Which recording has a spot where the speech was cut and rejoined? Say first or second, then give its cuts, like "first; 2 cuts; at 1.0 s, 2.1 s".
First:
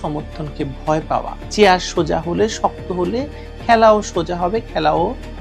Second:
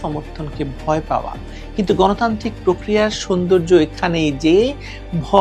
first; 1 cut; at 1.4 s